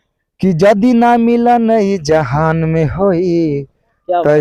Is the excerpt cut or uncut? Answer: uncut